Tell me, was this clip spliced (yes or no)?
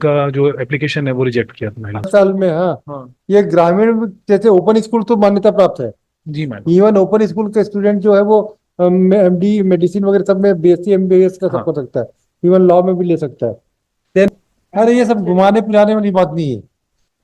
yes